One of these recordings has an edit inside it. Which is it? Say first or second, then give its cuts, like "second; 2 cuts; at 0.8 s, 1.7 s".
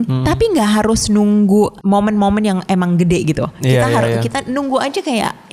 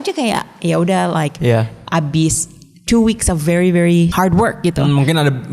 second; 1 cut; at 4.1 s